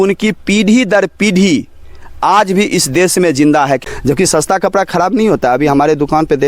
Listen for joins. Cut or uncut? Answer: cut